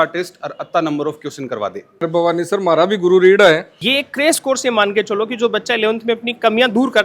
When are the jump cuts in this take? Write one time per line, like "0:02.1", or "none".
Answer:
0:02.1
0:03.8